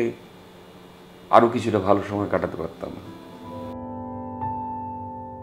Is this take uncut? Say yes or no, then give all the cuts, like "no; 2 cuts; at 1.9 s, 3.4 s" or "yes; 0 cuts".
no; 1 cut; at 3.5 s